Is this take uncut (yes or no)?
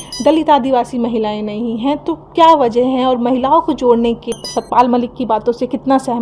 no